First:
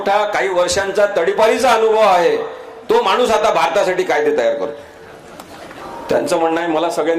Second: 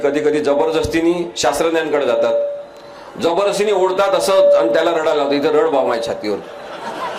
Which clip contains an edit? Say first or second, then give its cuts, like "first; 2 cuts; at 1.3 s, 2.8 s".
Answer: first; 1 cut; at 5.8 s